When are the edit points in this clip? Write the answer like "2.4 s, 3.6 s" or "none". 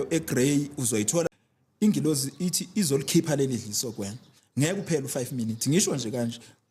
1.3 s